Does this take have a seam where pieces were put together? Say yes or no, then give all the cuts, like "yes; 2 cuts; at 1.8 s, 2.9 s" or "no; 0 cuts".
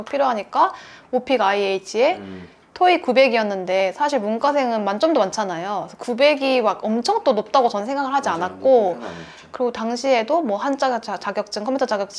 no; 0 cuts